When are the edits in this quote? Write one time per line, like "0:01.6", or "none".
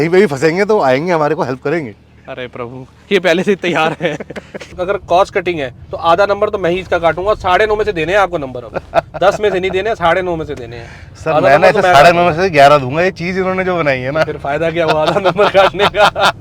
0:04.6

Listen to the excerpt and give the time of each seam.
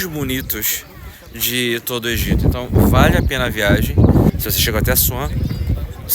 0:04.3

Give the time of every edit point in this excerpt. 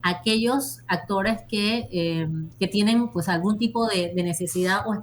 0:02.5

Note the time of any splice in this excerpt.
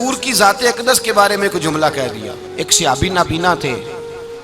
0:02.4

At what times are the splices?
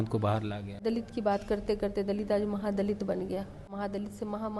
0:00.8
0:03.7

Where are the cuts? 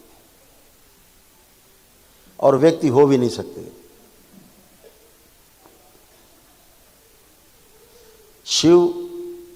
none

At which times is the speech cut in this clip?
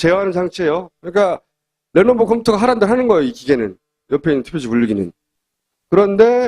0:04.4

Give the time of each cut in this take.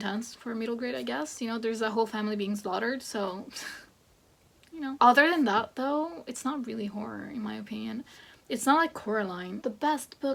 none

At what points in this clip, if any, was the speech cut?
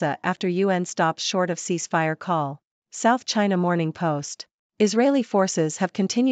none

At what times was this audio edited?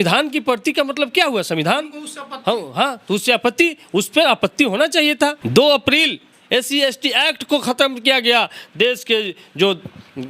0:05.4

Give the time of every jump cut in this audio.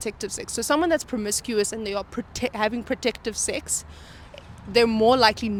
none

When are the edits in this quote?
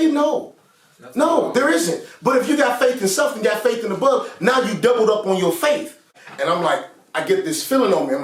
0:06.2

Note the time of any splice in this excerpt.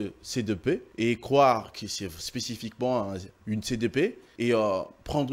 0:00.9
0:04.2

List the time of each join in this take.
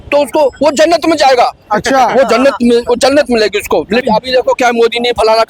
0:04.0

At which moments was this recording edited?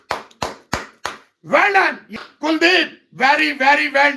0:02.1

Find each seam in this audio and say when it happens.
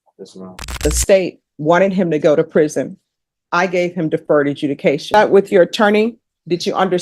0:00.8
0:05.1

